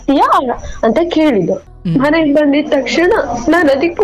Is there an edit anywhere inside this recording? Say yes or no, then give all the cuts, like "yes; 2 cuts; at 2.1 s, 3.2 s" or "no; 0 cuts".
yes; 1 cut; at 1.7 s